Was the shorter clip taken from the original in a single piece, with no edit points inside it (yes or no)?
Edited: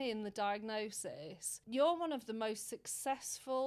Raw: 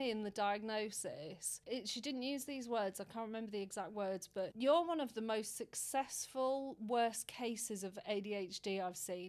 no